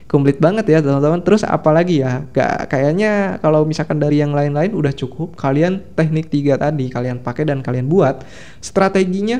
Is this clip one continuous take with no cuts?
yes; 0 cuts

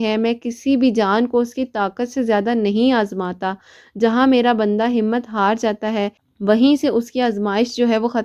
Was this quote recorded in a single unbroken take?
yes; 0 cuts

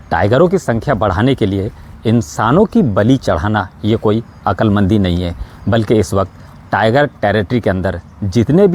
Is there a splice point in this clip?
no; 0 cuts

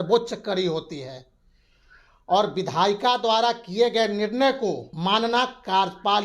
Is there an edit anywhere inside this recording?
yes; 1 cut; at 4.9 s

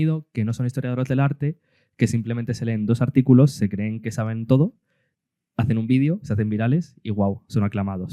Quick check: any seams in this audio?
no; 0 cuts

